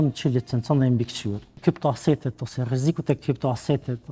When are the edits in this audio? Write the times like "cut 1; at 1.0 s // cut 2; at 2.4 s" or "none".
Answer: cut 1; at 1.5 s